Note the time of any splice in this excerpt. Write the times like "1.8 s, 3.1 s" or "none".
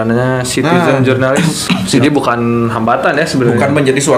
2.0 s